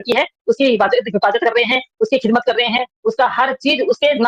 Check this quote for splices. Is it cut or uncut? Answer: uncut